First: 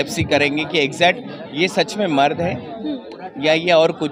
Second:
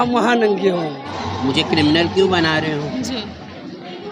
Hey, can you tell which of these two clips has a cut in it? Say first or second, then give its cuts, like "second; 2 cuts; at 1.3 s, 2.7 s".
second; 1 cut; at 1.2 s